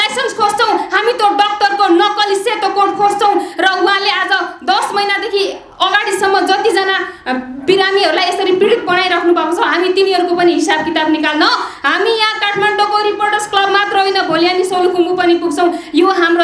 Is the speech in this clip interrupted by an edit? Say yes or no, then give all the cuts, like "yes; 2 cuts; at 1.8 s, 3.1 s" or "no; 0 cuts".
no; 0 cuts